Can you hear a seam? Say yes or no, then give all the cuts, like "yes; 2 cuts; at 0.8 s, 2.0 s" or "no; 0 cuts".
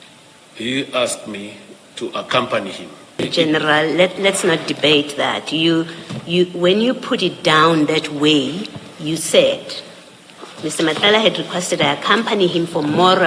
yes; 1 cut; at 3.2 s